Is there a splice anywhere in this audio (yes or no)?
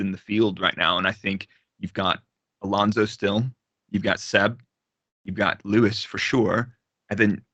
no